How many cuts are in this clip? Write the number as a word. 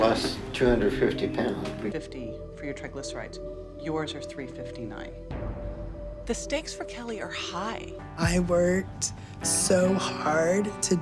two